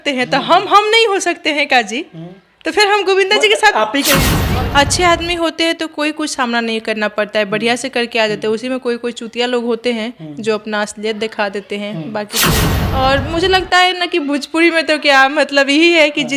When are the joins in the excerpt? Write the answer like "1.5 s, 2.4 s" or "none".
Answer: 4.4 s, 12.7 s